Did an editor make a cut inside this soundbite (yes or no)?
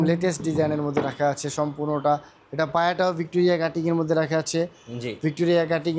no